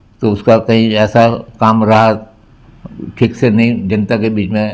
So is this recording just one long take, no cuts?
yes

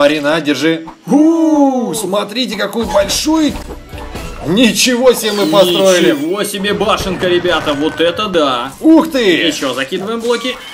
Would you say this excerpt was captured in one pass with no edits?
no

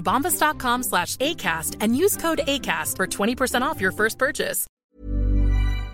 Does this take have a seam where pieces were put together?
yes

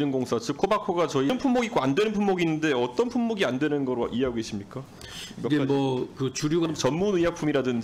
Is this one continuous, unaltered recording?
no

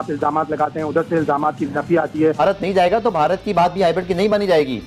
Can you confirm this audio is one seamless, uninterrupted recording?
no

